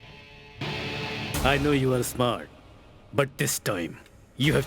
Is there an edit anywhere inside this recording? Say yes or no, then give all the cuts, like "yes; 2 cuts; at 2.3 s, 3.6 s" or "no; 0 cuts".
yes; 1 cut; at 1.2 s